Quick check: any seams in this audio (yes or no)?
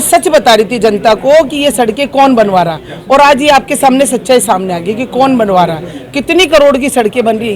no